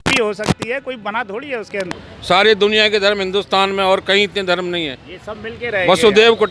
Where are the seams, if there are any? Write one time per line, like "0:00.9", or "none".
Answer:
0:01.9